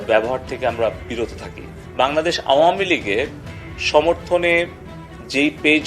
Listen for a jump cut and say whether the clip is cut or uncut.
cut